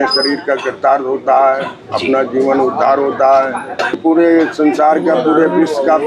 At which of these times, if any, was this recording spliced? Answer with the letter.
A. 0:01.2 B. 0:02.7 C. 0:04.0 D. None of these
C